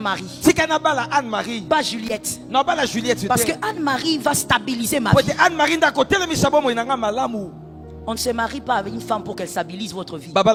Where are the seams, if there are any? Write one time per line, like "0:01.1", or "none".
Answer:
none